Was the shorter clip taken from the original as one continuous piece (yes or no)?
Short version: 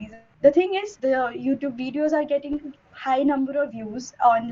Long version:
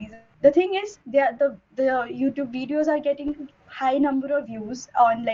no